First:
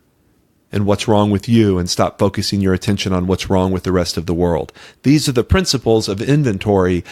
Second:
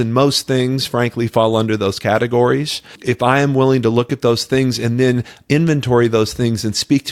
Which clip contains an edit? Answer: second; 1 cut; at 2.9 s

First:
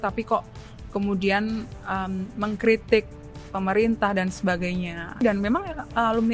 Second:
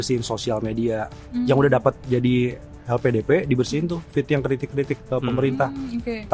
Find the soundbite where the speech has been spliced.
first; 1 cut; at 5.2 s

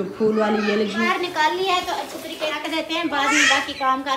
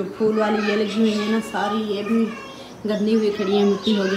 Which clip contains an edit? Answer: first; 2 cuts; at 1.0 s, 2.6 s

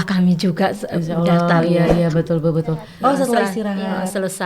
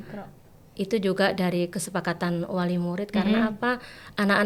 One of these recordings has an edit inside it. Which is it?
first; 1 cut; at 2.8 s

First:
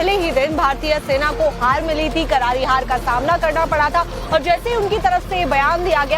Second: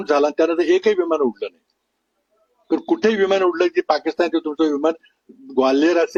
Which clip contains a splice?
first; 1 cut; at 3.0 s

